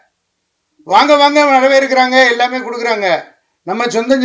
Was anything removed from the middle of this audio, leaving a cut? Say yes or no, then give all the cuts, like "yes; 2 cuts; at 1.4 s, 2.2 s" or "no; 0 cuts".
no; 0 cuts